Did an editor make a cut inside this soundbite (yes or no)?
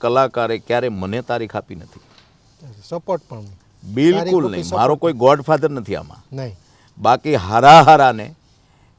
no